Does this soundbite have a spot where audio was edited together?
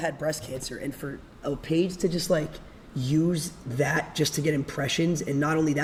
no; 0 cuts

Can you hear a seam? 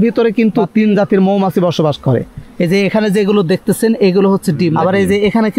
yes; 2 cuts; at 2.4 s, 4.7 s

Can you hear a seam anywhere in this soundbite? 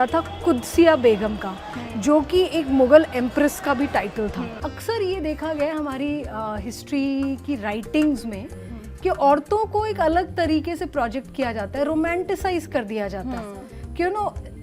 yes; 1 cut; at 4.5 s

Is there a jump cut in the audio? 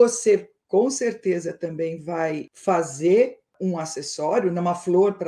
no; 0 cuts

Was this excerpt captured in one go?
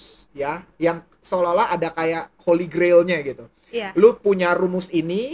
yes; 0 cuts

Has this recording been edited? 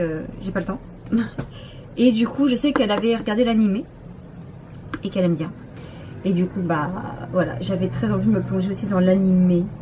yes; 1 cut; at 4.9 s

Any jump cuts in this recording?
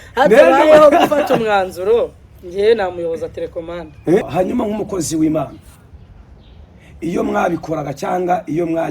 yes; 1 cut; at 4.3 s

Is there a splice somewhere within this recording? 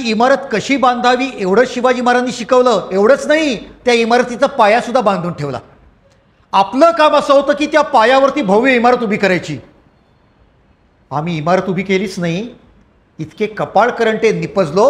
no; 0 cuts

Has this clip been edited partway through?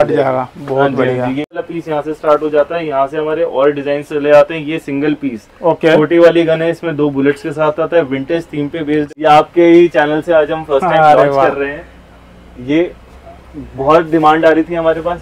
yes; 2 cuts; at 1.5 s, 9.0 s

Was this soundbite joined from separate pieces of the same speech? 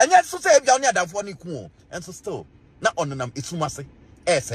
no; 0 cuts

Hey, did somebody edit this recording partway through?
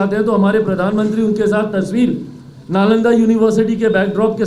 no; 0 cuts

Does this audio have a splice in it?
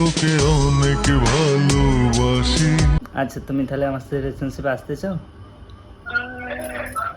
yes; 1 cut; at 3.0 s

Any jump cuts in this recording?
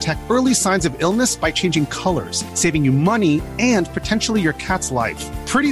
no; 0 cuts

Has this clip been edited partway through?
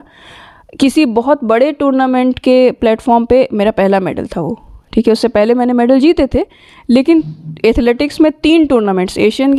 no; 0 cuts

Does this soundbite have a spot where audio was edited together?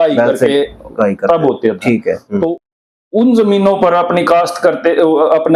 yes; 1 cut; at 2.6 s

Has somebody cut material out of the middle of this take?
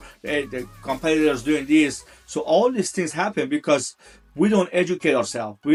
no; 0 cuts

